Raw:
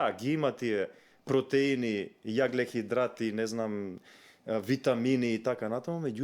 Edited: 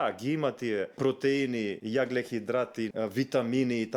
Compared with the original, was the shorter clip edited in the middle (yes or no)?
yes